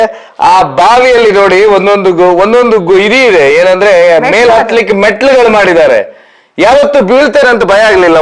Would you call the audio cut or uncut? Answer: uncut